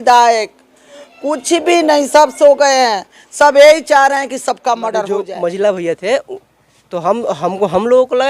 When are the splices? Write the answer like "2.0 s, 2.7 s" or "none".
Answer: 5.3 s